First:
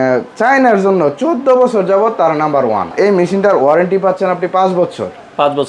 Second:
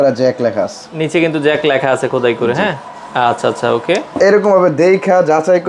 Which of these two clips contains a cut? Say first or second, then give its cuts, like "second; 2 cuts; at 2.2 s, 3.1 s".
first; 1 cut; at 2.9 s